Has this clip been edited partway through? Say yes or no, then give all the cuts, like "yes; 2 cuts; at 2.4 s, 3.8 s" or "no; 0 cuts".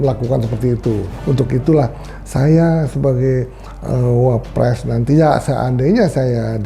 yes; 1 cut; at 1.1 s